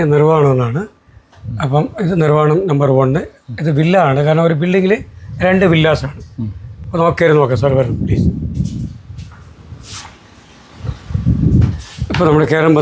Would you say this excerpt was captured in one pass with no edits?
yes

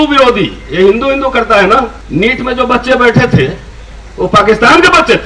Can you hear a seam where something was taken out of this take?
yes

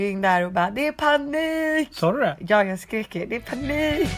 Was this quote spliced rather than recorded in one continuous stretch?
no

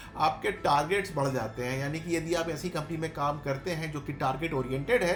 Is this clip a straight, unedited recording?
yes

